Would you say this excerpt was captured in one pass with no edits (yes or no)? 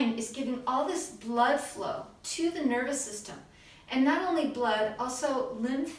yes